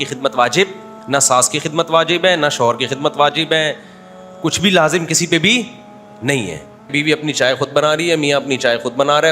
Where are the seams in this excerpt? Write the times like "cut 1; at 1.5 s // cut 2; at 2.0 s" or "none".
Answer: cut 1; at 0.9 s // cut 2; at 6.9 s